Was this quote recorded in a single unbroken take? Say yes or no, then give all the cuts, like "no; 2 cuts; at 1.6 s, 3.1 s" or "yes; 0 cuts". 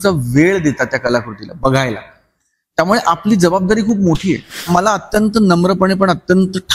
no; 1 cut; at 4.6 s